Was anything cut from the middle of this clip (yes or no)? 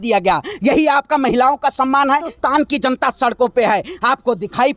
yes